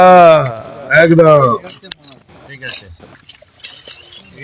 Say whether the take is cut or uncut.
uncut